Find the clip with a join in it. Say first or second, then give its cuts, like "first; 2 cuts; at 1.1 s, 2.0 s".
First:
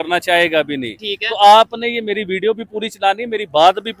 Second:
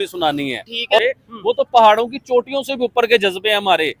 second; 1 cut; at 1.0 s